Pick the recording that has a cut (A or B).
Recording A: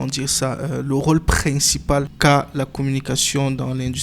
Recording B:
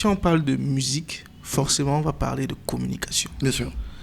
A